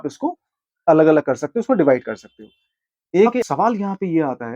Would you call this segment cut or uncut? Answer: cut